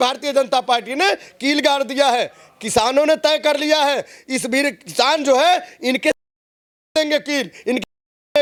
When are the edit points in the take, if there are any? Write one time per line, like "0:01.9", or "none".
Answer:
none